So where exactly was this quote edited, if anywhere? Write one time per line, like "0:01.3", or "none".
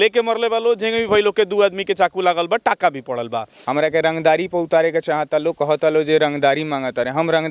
0:03.6